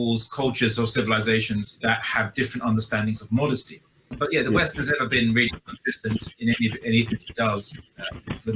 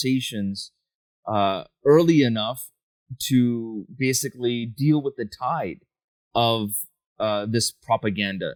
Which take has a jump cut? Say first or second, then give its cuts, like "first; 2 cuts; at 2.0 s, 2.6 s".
first; 1 cut; at 4.1 s